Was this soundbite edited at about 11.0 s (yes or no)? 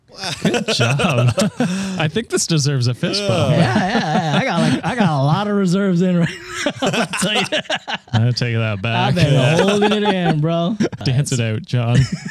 yes